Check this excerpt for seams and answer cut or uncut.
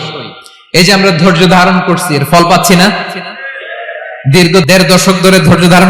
uncut